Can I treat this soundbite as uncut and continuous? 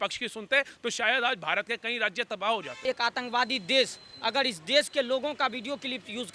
no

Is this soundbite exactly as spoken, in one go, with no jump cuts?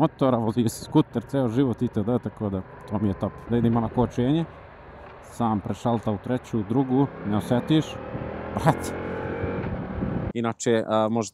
no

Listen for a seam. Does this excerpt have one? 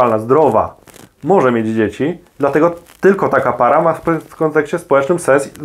no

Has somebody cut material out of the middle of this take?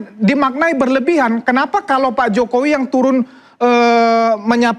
no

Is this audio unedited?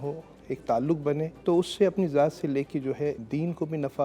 no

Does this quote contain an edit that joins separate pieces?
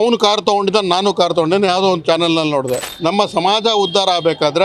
yes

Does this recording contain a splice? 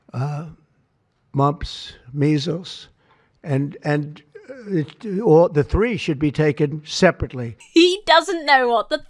no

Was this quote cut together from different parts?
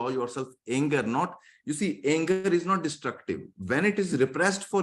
no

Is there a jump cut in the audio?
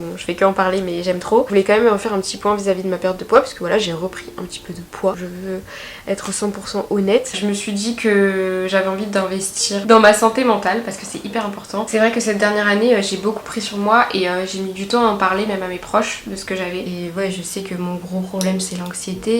yes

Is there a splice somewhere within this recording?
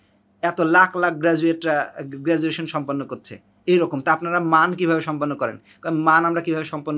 no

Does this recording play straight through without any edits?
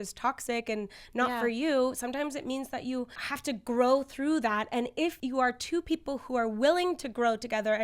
no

